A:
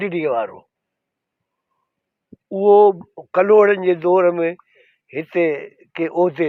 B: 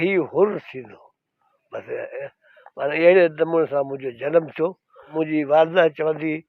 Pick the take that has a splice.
B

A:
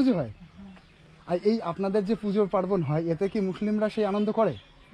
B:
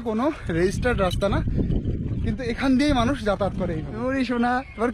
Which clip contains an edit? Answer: B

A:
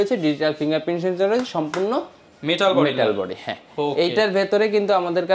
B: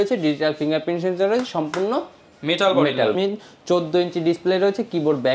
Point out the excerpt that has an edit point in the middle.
B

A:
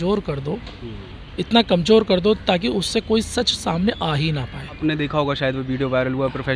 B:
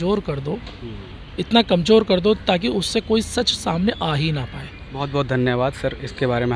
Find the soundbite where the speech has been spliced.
A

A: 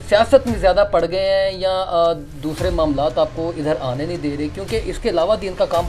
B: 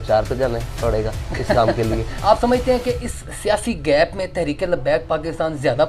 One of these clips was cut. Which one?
B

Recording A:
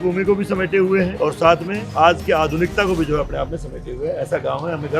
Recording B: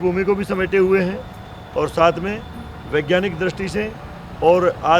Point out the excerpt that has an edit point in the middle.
A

